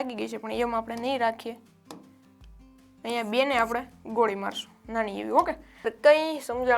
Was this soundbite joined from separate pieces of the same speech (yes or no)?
yes